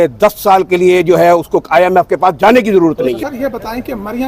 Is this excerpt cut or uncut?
cut